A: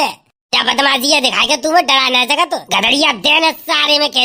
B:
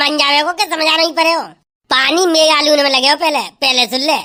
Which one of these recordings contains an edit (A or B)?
A